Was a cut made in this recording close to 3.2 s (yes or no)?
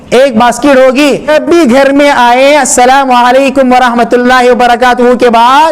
no